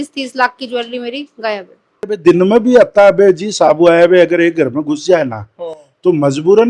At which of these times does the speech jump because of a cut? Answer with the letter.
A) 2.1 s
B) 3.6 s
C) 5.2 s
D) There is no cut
A